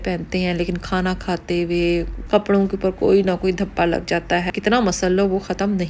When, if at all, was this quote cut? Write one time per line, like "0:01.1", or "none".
0:02.2
0:04.5